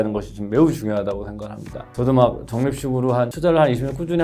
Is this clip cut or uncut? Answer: cut